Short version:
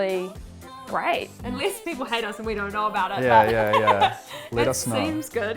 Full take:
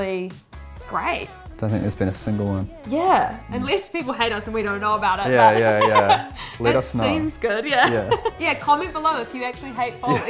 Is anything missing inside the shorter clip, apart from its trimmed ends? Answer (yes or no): yes